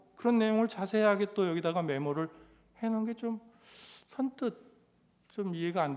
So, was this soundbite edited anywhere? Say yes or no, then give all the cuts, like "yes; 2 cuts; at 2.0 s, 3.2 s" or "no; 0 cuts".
no; 0 cuts